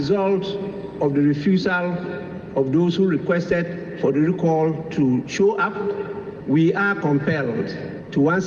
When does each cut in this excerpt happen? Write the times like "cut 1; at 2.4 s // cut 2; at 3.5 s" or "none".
none